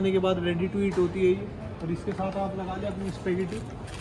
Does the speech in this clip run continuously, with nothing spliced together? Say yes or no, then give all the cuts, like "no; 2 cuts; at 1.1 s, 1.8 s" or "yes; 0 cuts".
yes; 0 cuts